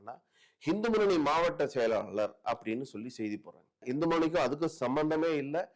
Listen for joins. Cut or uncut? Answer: cut